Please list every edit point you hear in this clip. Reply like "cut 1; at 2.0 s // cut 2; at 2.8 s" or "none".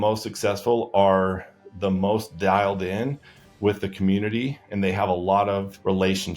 none